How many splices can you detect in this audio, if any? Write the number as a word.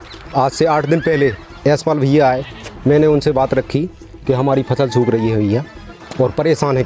zero